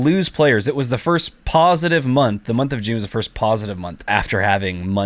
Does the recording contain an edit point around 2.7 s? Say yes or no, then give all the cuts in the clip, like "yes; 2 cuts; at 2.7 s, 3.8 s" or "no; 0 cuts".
no; 1 cut; at 4.1 s